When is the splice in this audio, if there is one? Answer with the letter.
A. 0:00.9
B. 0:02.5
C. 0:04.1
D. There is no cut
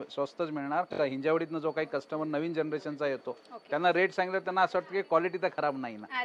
A